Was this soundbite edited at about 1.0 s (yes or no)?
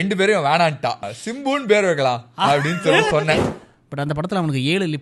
yes